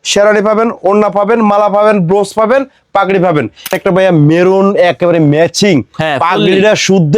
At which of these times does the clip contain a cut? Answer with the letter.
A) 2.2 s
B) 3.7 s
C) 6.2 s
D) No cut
B